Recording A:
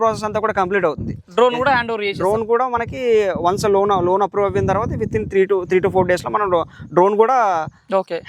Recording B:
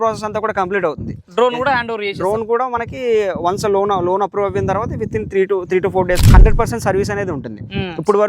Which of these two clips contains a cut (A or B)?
B